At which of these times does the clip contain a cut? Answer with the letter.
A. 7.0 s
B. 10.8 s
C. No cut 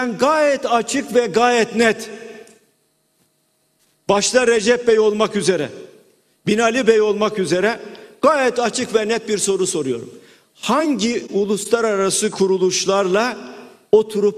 B